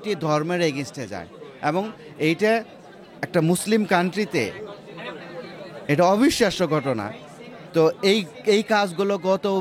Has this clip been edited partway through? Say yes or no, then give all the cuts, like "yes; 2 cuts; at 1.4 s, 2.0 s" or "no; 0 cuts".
no; 0 cuts